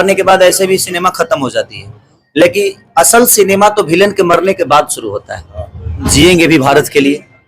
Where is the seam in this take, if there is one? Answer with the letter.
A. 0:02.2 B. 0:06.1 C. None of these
B